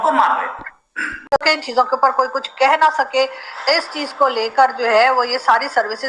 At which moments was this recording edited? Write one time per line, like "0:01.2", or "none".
0:01.3